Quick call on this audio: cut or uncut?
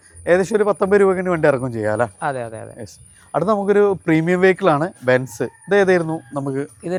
uncut